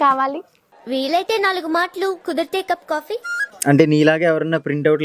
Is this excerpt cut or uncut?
cut